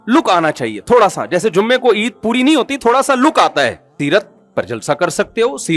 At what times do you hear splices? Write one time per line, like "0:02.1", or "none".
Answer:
0:03.9